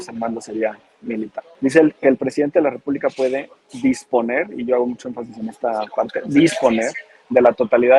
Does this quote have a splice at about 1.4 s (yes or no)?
yes